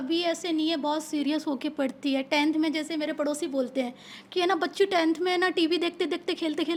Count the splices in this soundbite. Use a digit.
0